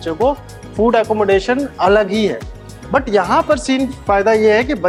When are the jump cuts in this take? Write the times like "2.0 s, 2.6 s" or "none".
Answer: none